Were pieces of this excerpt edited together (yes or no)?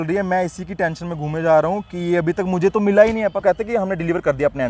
yes